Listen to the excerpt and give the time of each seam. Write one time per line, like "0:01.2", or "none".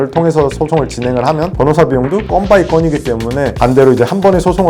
0:03.5